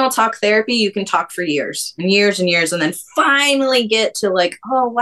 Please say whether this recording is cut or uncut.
uncut